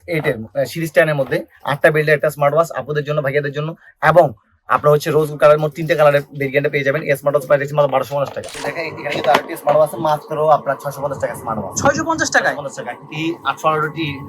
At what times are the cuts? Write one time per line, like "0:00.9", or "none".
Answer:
0:08.5